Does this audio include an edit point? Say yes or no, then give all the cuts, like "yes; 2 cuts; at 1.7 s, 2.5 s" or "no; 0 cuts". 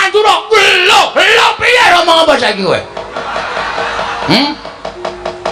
yes; 1 cut; at 1.9 s